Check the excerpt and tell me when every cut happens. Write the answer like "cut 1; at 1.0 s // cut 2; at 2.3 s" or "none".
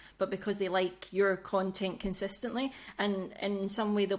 none